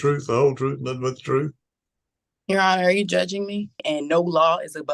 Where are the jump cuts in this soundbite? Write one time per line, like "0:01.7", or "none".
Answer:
0:03.8